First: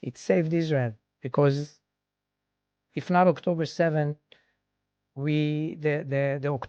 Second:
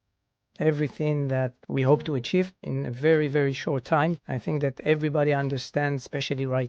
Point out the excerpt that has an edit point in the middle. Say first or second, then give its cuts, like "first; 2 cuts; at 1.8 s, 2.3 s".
second; 3 cuts; at 1.6 s, 2.7 s, 4.3 s